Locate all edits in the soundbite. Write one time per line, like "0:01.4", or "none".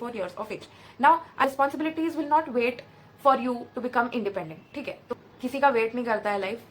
0:01.4
0:05.1